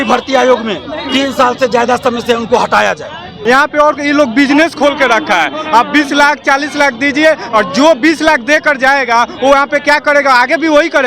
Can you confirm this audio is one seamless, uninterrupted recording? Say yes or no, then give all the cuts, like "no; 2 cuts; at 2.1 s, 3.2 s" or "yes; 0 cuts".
no; 1 cut; at 3.3 s